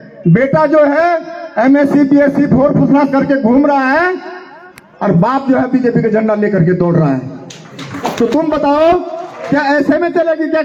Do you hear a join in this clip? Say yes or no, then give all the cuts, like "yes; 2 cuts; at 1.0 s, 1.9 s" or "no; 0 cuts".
no; 0 cuts